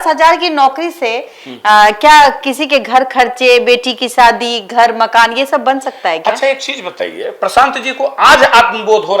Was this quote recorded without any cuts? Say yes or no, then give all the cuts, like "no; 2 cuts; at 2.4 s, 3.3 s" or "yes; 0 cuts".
yes; 0 cuts